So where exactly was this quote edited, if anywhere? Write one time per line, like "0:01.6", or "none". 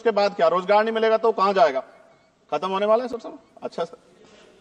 none